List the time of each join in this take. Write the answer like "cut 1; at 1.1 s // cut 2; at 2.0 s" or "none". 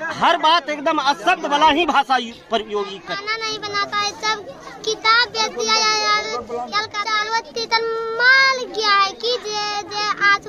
cut 1; at 3.0 s // cut 2; at 7.0 s

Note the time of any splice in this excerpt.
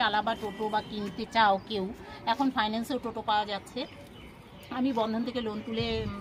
none

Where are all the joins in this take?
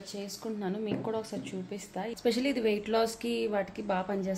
cut 1; at 2.1 s

